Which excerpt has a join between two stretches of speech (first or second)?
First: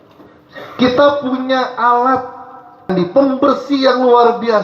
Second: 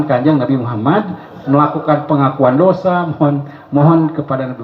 first